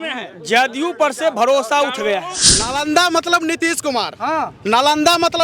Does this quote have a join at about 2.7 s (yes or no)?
yes